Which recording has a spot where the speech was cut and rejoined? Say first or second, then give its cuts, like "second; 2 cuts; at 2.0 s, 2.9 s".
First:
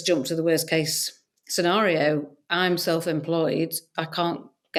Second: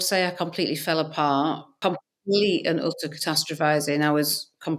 second; 1 cut; at 1.8 s